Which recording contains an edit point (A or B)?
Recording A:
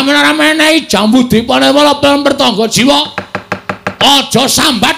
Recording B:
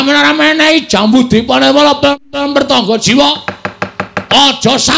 A